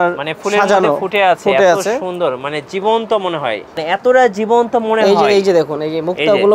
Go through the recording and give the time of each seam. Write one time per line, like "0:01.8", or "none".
0:03.7